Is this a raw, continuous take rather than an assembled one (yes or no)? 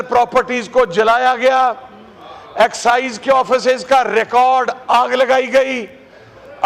yes